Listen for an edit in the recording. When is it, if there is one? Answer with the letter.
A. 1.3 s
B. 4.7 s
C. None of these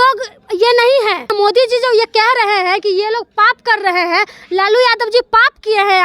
A